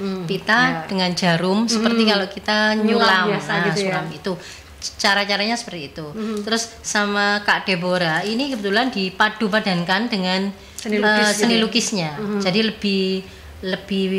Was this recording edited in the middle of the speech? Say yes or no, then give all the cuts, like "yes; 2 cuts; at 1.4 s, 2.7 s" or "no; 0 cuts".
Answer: no; 0 cuts